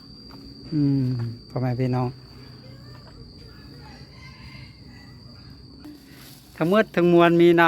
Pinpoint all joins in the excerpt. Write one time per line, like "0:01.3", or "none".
0:05.9